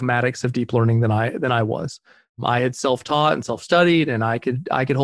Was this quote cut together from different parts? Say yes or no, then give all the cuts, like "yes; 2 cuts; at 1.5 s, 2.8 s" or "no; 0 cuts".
no; 0 cuts